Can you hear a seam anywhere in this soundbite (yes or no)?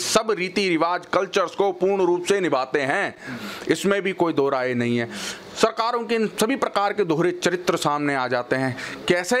no